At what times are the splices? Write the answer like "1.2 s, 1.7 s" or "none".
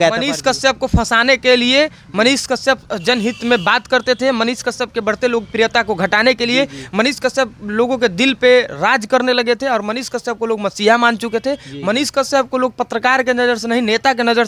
none